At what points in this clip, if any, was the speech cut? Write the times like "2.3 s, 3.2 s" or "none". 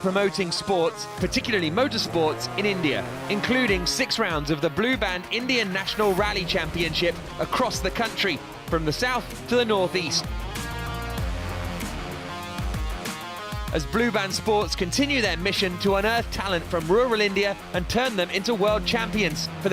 none